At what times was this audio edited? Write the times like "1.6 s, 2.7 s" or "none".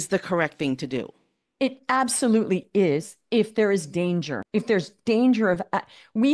4.4 s